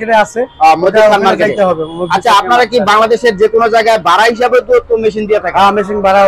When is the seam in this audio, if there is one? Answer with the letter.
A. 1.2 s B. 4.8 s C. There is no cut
C